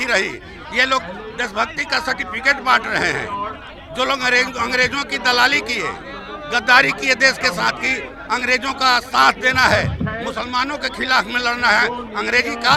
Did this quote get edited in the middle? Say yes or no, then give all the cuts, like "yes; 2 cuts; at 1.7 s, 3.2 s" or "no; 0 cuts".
no; 0 cuts